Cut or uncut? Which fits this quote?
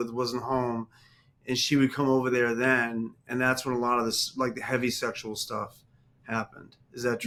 uncut